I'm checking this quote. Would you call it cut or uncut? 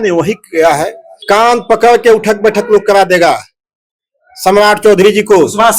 cut